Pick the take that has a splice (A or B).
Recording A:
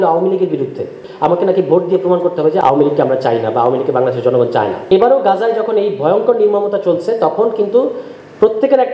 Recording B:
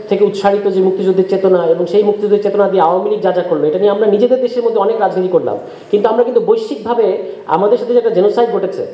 A